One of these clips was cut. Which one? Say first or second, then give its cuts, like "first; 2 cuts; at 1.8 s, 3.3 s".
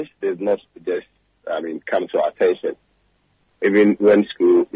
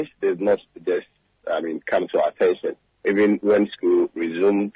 second; 1 cut; at 2.9 s